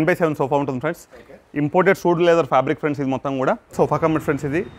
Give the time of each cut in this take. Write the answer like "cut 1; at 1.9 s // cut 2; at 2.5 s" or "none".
cut 1; at 3.7 s